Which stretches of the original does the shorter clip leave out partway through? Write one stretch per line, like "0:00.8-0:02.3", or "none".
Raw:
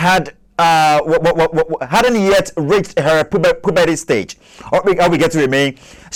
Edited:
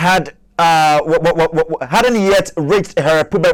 none